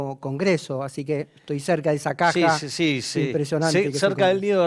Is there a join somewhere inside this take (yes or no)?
no